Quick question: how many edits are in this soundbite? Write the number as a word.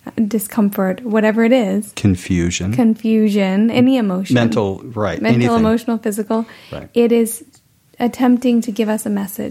zero